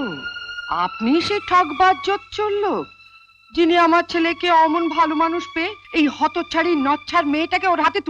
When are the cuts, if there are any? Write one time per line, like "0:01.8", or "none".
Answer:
none

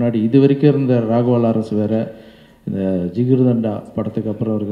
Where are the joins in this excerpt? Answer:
none

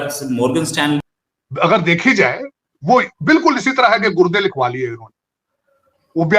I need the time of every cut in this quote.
0:01.0

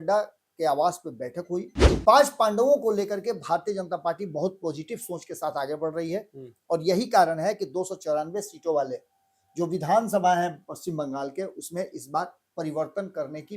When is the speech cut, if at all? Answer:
0:01.8

